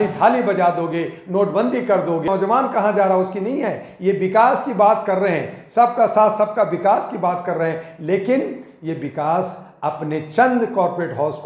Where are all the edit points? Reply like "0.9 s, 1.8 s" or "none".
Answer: 2.3 s